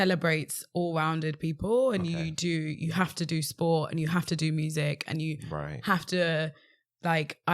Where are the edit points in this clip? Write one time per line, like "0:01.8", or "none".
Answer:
none